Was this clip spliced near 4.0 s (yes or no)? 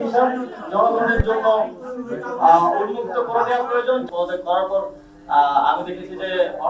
yes